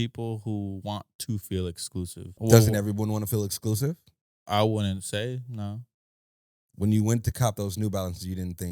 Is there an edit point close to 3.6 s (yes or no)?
no